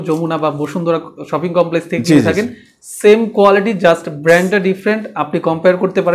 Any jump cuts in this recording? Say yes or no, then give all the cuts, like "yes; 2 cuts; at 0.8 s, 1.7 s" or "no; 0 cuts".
no; 0 cuts